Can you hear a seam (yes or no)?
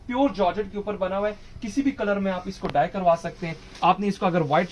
no